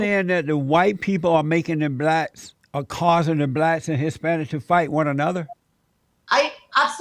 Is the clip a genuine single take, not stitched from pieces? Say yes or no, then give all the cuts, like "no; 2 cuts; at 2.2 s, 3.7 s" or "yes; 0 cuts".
yes; 0 cuts